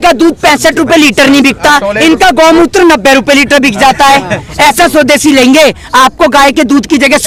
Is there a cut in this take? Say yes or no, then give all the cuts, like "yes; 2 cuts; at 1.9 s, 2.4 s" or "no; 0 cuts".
no; 0 cuts